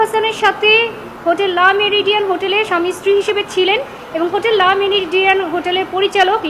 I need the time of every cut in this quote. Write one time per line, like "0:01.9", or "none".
none